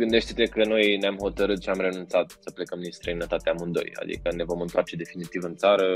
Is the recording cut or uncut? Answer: uncut